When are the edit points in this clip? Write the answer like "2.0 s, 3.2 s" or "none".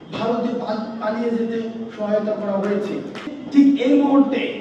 3.2 s